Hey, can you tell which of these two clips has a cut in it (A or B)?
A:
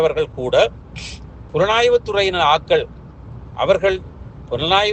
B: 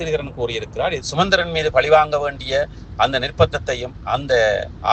B